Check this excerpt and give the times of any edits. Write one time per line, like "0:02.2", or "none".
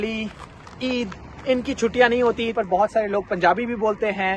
0:02.5